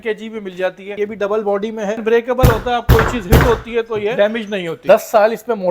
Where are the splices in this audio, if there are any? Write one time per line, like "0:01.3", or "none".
0:00.9
0:02.0
0:04.2